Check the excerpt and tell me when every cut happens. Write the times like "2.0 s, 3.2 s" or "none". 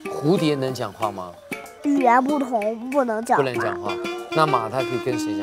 none